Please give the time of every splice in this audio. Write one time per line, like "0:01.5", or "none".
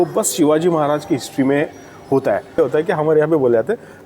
0:02.6